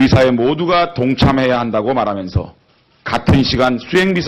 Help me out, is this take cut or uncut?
cut